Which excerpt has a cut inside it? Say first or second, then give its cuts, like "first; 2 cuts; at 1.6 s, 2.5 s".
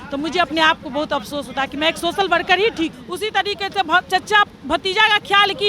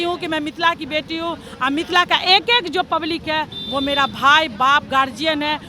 first; 1 cut; at 3.0 s